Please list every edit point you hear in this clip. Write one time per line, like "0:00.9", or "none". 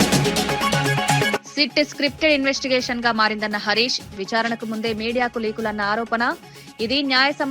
0:01.4